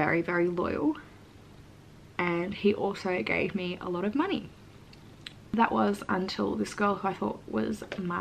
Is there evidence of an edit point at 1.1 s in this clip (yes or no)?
no